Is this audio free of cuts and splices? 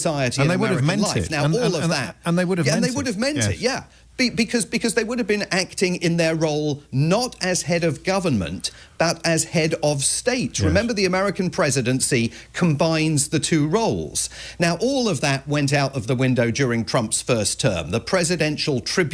no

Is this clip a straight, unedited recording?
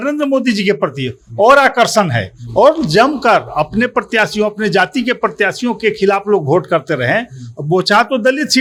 yes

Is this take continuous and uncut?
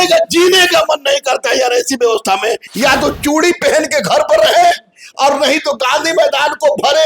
no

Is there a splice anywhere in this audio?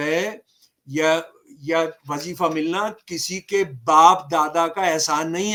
no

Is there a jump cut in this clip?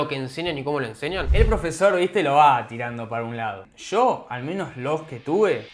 yes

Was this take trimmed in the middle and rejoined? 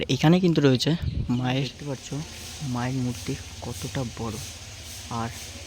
yes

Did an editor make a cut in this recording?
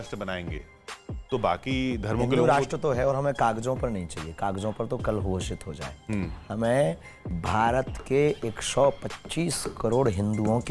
no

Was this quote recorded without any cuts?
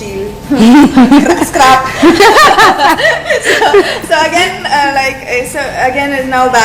yes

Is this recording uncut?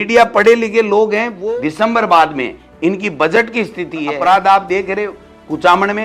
no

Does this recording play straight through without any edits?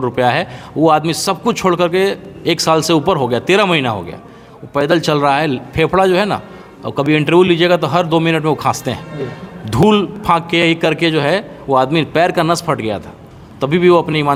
yes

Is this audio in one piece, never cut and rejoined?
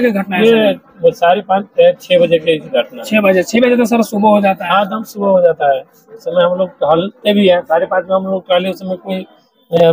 yes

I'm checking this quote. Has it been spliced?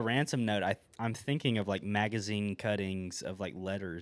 no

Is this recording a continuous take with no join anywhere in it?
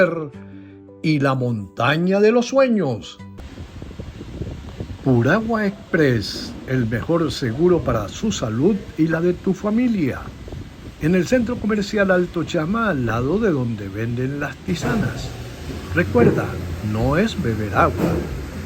no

